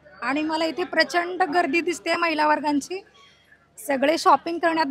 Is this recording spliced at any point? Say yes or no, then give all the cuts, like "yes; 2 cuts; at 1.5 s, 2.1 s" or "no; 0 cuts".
no; 0 cuts